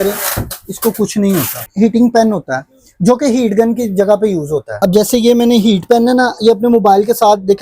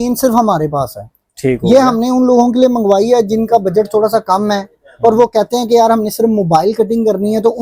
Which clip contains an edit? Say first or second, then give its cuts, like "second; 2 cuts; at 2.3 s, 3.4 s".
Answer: first; 2 cuts; at 1.7 s, 4.8 s